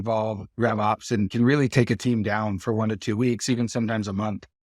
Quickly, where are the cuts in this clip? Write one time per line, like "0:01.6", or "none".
0:01.3